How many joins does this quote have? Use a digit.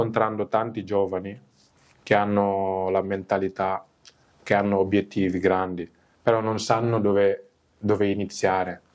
0